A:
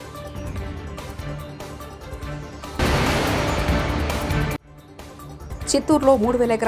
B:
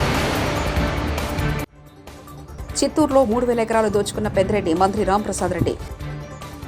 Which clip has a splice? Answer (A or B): A